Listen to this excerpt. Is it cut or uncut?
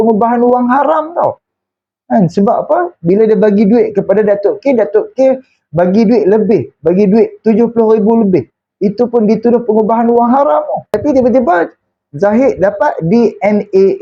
uncut